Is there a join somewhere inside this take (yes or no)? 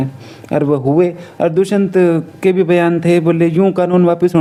no